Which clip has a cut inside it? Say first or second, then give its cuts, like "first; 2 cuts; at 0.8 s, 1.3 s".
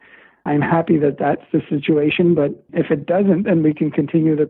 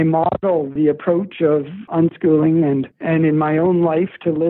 second; 2 cuts; at 0.7 s, 1.8 s